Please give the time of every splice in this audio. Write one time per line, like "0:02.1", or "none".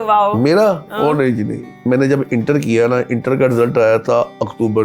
0:01.7